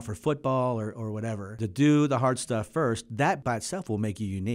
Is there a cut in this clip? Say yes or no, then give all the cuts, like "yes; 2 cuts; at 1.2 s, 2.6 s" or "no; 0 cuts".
yes; 2 cuts; at 1.6 s, 3.4 s